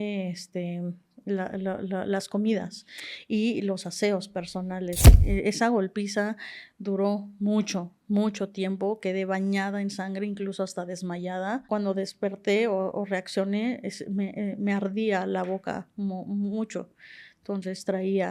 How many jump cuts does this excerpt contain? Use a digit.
2